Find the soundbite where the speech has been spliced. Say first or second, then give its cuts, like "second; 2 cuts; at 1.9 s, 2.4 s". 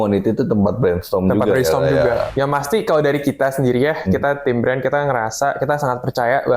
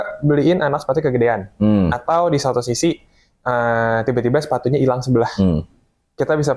first; 1 cut; at 2.3 s